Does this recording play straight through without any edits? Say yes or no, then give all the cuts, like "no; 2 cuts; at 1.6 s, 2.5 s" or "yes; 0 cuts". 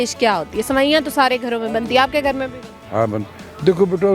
yes; 0 cuts